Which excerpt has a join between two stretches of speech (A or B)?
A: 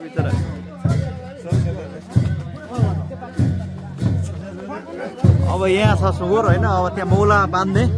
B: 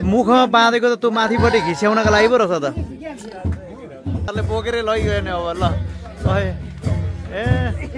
B